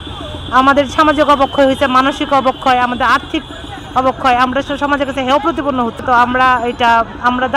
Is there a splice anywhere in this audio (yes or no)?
yes